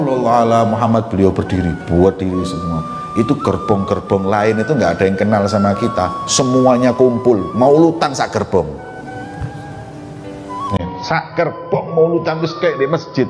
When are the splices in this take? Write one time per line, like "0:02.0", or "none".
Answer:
none